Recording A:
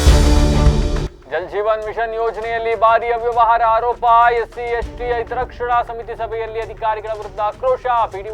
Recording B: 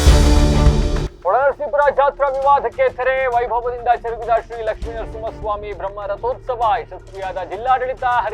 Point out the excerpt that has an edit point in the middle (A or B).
B